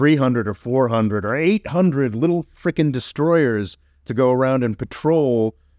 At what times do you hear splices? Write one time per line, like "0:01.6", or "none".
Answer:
none

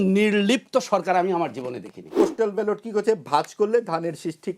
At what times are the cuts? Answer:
0:02.1

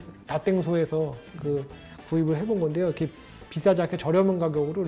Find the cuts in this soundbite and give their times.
none

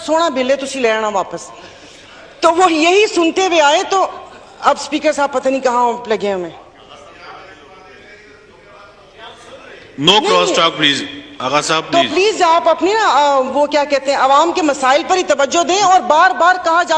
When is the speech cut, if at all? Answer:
none

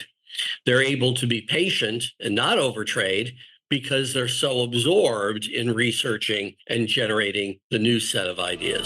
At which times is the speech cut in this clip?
0:06.6
0:07.6

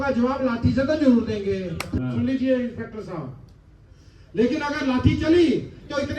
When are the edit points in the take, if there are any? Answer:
0:01.9

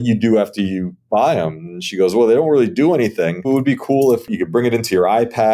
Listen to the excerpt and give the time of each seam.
0:03.4
0:04.3

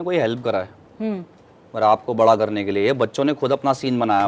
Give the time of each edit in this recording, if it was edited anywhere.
none

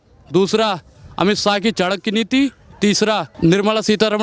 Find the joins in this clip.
0:03.3

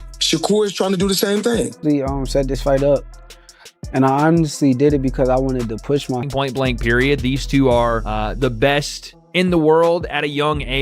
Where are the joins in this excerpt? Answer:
0:01.8
0:06.2

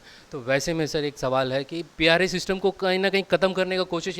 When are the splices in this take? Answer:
0:01.8

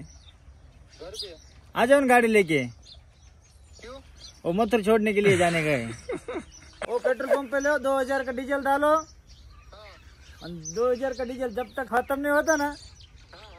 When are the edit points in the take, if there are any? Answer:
none

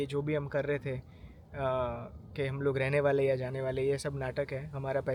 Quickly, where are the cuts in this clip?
none

